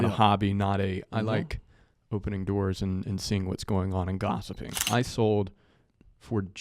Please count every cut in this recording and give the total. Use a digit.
1